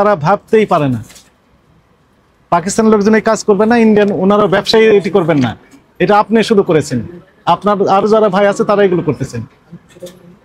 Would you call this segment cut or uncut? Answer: uncut